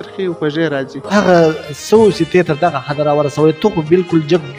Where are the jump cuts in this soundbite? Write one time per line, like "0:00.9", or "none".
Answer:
0:01.1